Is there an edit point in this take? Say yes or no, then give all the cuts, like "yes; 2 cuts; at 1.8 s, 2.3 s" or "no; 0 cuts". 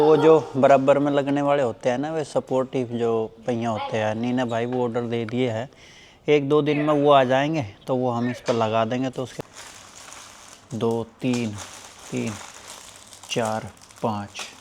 yes; 1 cut; at 9.3 s